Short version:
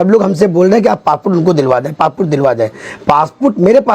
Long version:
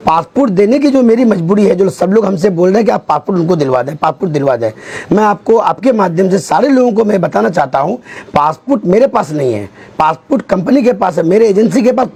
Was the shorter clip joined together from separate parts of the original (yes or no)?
yes